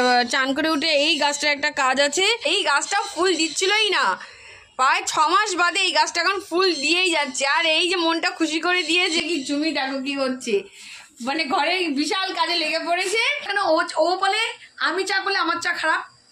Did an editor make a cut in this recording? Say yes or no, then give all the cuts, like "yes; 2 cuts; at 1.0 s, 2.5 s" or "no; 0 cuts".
yes; 3 cuts; at 2.5 s, 9.2 s, 13.4 s